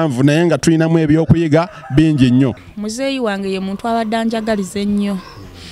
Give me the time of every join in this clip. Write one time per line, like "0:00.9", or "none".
0:02.6